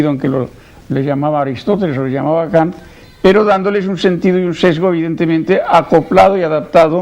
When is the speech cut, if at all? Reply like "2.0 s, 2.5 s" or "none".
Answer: 1.6 s